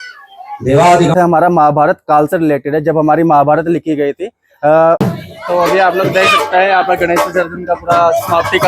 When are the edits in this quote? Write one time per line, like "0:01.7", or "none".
0:01.1
0:05.0